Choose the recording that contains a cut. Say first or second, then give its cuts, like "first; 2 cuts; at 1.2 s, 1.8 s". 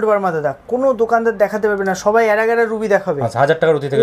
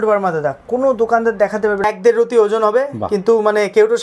second; 1 cut; at 1.8 s